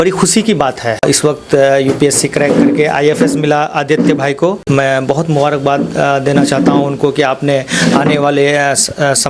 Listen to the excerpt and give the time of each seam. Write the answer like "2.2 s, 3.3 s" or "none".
1.0 s, 4.6 s